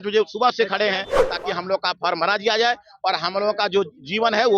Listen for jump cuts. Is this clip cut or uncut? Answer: cut